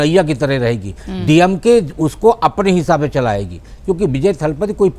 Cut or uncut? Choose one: uncut